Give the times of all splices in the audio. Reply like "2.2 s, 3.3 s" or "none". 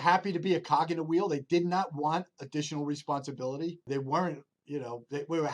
3.9 s